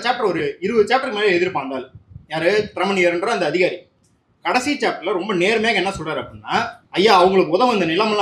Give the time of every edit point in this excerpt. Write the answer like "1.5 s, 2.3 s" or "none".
6.8 s